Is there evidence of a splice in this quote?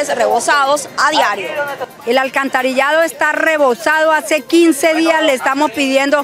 yes; 1 cut; at 1.8 s

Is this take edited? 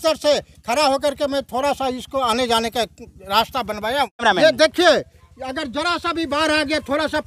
yes; 1 cut; at 4.2 s

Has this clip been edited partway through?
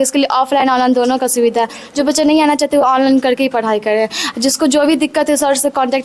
no; 0 cuts

